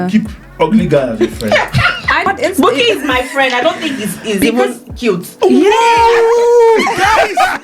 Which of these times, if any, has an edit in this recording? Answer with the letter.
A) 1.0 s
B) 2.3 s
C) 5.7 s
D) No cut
B